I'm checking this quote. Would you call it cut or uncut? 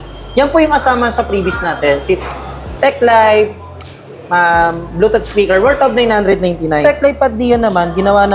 cut